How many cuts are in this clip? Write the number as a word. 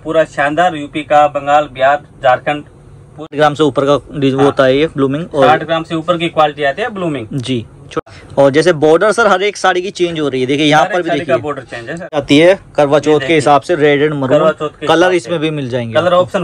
three